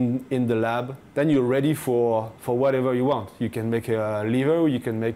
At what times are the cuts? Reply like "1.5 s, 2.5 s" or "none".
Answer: 1.0 s